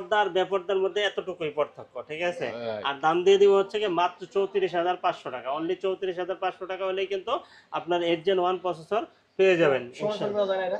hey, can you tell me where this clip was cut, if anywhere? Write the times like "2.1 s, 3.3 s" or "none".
none